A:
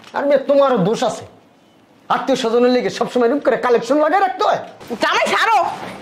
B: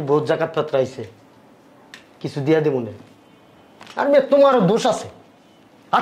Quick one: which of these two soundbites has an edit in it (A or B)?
A